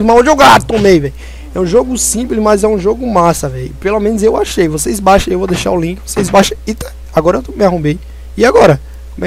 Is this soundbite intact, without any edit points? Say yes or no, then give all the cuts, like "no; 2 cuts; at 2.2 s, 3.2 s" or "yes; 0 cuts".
yes; 0 cuts